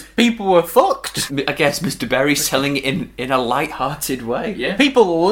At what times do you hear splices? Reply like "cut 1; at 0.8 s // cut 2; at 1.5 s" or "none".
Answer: cut 1; at 1.2 s